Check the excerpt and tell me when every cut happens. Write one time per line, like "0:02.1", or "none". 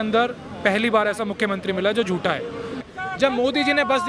0:02.8